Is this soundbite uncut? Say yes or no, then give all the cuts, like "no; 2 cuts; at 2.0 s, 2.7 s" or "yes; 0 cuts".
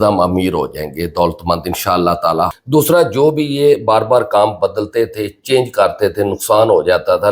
no; 1 cut; at 2.5 s